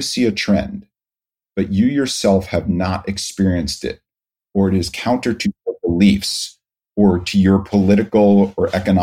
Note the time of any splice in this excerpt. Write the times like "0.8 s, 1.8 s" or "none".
none

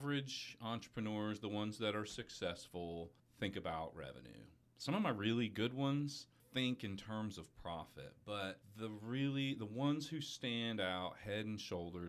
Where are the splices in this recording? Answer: 3.2 s

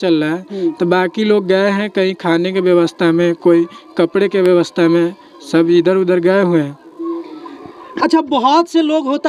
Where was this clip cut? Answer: none

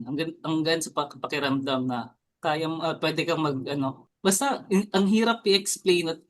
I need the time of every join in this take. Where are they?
2.2 s, 4.0 s

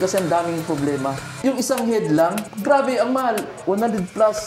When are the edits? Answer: 1.3 s, 2.5 s

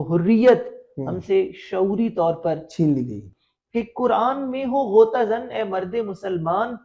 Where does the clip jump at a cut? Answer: 3.3 s

